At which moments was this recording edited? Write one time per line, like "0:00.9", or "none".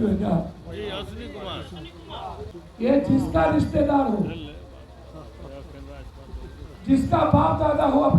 0:02.5